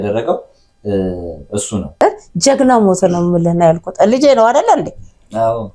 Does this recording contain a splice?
yes; 1 cut; at 1.8 s

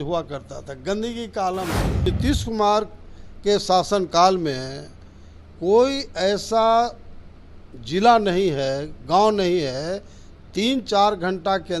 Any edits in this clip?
yes; 1 cut; at 2.0 s

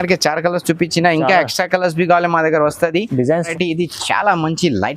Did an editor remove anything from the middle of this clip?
yes; 1 cut; at 3.5 s

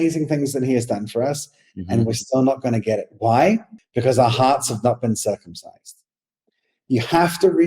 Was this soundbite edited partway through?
yes; 1 cut; at 3.8 s

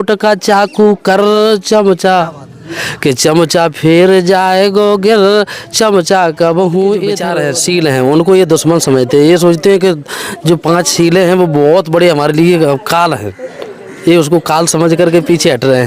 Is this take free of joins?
no; 1 cut; at 7.3 s

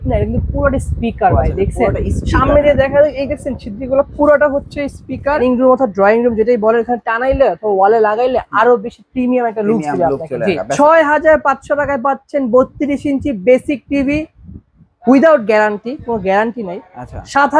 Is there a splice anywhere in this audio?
yes; 2 cuts; at 5.4 s, 10.6 s

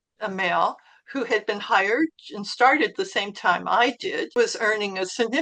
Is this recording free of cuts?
no; 1 cut; at 4.3 s

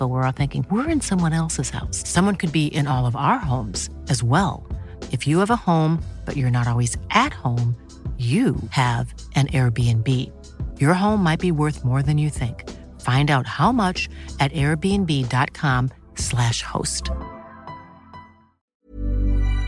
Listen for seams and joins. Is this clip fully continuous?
no; 1 cut; at 18.8 s

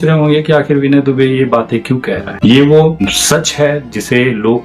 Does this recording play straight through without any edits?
no; 2 cuts; at 2.3 s, 3.0 s

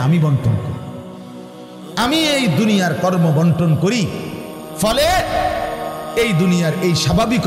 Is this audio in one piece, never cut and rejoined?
yes; 0 cuts

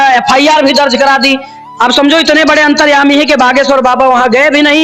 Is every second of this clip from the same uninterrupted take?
yes; 0 cuts

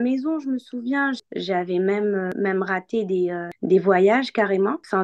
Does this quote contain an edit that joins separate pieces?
yes; 2 cuts; at 1.3 s, 2.3 s

